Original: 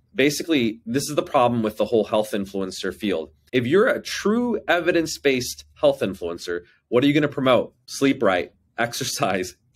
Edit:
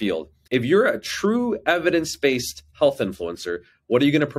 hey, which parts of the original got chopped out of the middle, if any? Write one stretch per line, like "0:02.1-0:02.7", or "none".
none